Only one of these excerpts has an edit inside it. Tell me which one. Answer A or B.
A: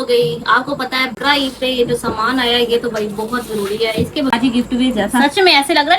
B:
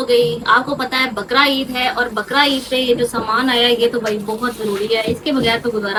A